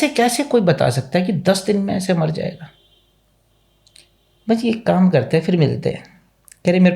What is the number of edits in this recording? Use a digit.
0